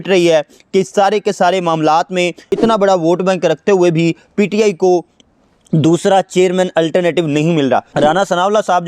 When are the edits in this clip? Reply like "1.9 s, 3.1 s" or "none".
2.5 s, 7.9 s